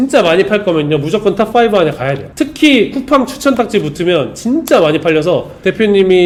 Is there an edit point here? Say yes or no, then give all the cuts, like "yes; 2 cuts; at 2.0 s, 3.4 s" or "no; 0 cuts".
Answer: no; 0 cuts